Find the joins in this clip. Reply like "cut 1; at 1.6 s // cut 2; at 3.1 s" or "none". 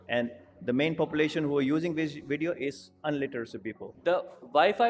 cut 1; at 3.9 s